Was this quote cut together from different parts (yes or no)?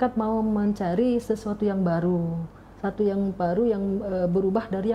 no